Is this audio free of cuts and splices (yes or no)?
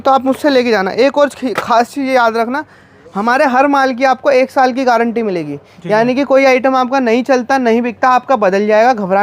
yes